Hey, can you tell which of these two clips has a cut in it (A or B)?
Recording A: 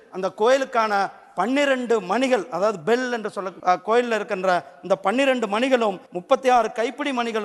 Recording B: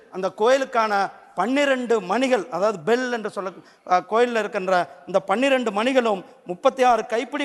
A